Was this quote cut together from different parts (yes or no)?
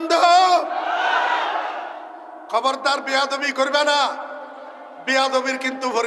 no